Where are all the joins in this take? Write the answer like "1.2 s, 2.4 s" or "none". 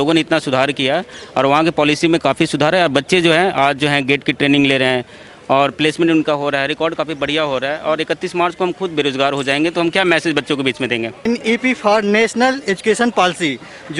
11.2 s